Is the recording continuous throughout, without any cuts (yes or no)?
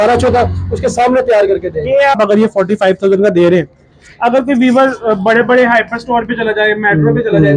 no